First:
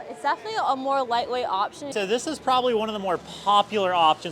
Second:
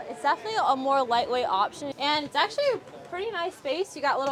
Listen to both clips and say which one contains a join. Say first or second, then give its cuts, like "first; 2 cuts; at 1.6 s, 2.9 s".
first; 1 cut; at 1.8 s